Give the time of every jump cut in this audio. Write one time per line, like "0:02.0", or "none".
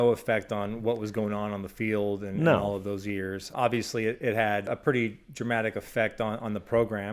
0:03.5
0:04.7